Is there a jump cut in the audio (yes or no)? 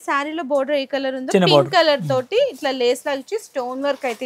no